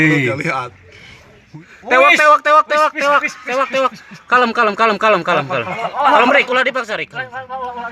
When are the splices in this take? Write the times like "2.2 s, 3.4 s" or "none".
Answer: 1.4 s